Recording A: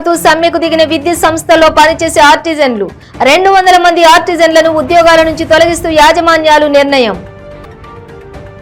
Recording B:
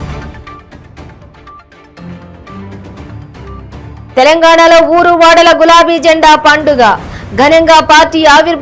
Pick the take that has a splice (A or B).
B